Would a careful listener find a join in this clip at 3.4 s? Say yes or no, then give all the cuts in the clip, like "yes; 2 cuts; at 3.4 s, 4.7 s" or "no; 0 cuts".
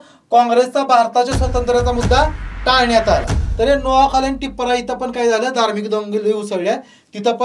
yes; 1 cut; at 3.4 s